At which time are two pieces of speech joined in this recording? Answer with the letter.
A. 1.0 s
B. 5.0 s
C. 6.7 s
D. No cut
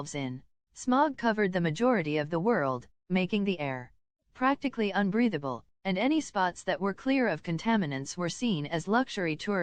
D